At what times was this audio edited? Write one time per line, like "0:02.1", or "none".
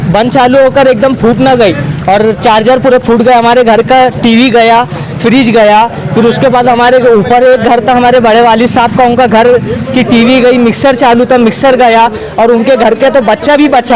none